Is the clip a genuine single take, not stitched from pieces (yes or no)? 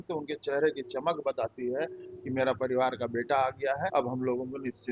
no